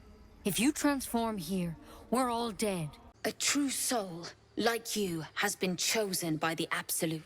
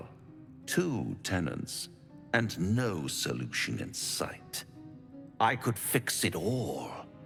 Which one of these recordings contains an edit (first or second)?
first